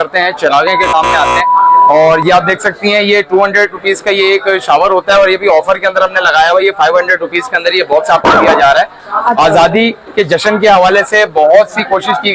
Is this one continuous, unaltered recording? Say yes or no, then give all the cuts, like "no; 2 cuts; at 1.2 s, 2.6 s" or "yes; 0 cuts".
yes; 0 cuts